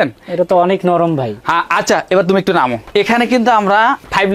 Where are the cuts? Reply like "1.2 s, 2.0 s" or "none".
none